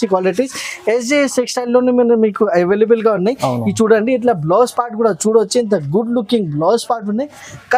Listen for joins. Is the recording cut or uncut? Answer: uncut